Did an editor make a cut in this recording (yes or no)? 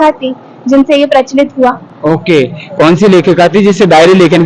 no